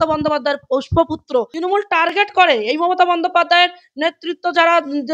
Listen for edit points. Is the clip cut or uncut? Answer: cut